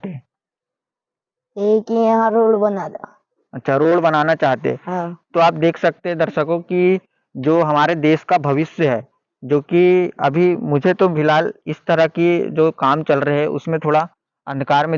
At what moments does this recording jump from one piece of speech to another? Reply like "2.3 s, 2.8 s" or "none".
none